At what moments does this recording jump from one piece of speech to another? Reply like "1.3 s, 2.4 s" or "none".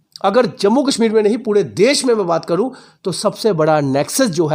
none